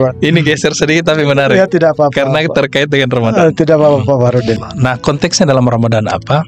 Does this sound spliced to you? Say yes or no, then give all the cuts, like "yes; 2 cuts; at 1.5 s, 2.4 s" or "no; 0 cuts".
yes; 1 cut; at 4.6 s